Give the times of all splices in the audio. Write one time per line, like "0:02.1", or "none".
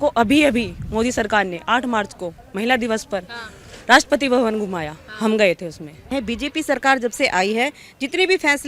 0:06.1